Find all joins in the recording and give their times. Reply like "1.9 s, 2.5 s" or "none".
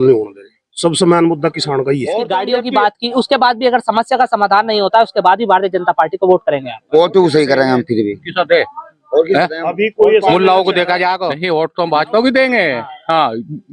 2.2 s, 11.3 s